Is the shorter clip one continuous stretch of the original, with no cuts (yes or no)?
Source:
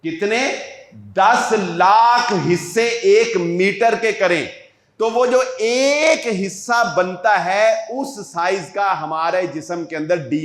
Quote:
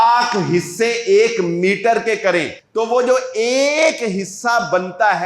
no